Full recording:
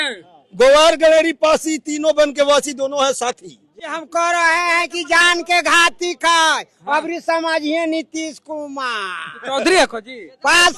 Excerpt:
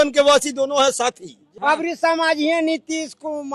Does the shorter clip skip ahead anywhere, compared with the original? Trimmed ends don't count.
yes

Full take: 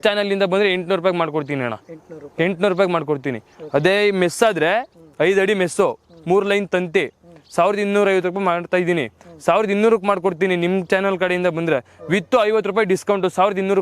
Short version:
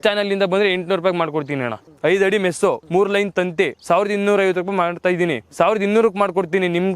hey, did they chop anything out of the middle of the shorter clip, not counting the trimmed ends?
yes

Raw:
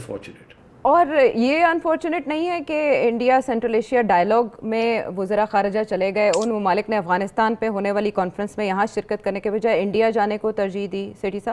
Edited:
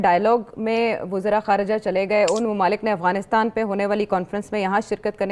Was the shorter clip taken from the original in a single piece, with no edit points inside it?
yes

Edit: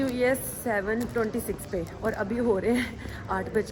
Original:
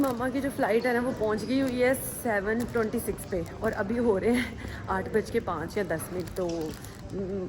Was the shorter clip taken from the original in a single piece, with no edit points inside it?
yes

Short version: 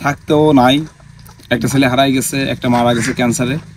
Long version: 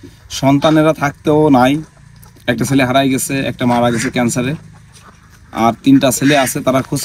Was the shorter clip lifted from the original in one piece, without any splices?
yes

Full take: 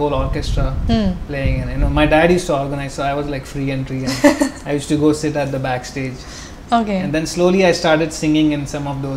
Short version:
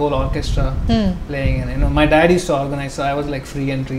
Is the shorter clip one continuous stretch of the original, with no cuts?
yes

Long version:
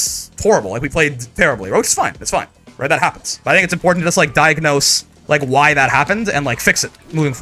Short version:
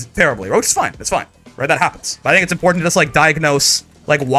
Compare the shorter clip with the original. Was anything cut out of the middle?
no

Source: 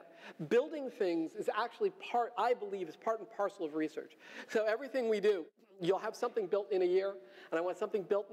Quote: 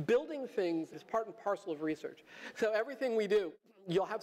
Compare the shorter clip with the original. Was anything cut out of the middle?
yes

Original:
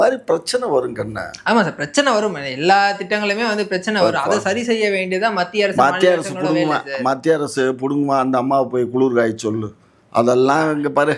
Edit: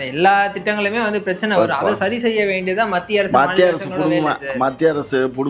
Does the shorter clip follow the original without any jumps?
yes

